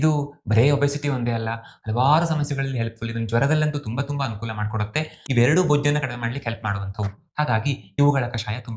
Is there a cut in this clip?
yes; 1 cut; at 5.2 s

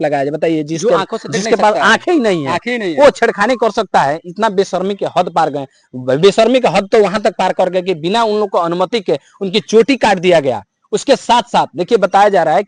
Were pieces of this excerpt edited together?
no; 0 cuts

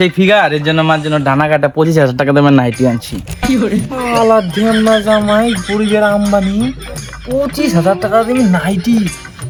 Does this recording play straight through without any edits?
yes; 0 cuts

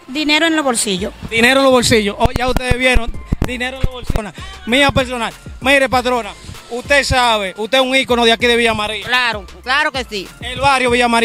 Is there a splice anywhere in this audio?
no; 0 cuts

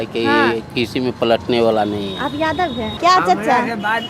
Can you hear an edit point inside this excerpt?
yes; 1 cut; at 2.9 s

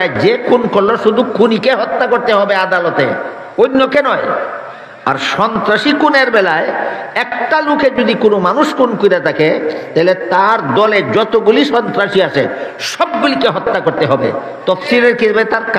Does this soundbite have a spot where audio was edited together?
no; 0 cuts

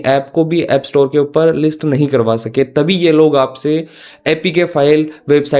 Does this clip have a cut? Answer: no; 0 cuts

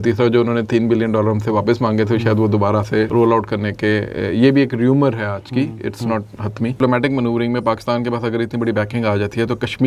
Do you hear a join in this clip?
yes; 2 cuts; at 3.1 s, 6.8 s

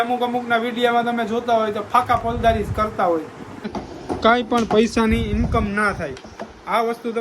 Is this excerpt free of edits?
no; 1 cut; at 3.8 s

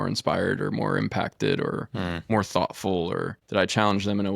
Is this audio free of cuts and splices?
no; 1 cut; at 3.4 s

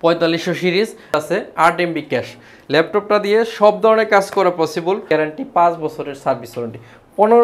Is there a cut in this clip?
yes; 2 cuts; at 1.1 s, 5.0 s

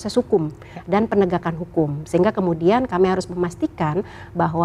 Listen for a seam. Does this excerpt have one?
no; 0 cuts

